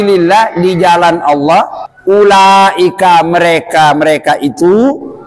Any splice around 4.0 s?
no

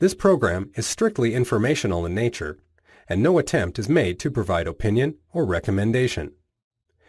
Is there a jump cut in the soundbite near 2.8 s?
no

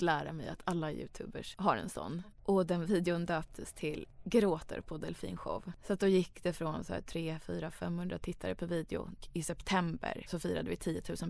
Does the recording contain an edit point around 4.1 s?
yes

